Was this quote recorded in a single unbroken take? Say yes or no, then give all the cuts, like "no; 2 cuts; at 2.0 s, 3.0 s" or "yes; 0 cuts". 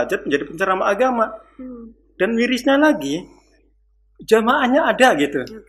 yes; 0 cuts